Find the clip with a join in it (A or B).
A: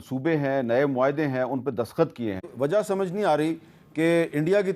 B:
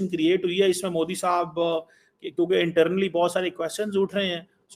A